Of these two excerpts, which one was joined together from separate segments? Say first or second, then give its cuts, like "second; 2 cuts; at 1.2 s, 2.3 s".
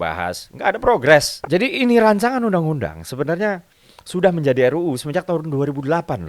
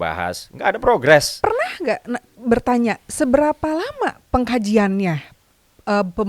first; 1 cut; at 1.3 s